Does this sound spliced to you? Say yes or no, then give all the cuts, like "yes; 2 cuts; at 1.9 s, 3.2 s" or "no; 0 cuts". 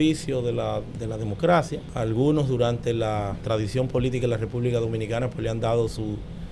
yes; 2 cuts; at 1.8 s, 3.4 s